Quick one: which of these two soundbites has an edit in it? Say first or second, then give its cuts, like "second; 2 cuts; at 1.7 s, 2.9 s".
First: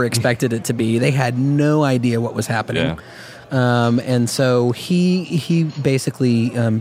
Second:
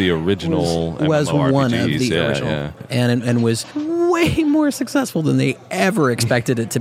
second; 2 cuts; at 2.7 s, 3.7 s